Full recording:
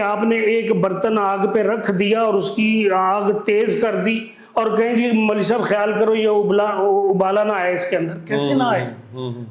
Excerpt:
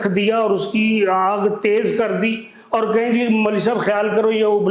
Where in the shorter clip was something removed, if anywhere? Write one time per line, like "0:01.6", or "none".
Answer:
none

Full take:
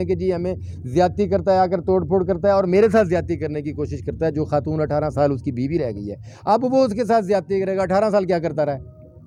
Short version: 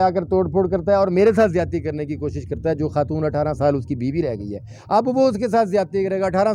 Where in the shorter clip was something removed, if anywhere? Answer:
none

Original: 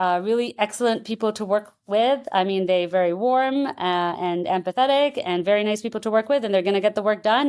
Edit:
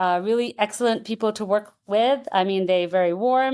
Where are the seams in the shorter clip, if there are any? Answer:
none

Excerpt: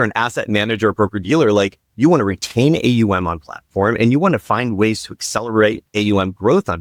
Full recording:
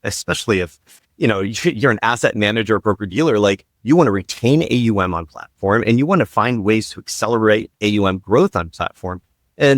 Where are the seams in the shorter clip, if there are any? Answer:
none

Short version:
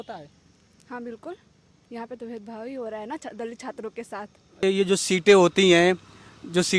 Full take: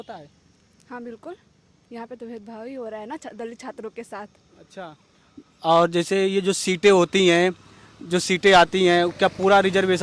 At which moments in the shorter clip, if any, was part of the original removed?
0:04.6

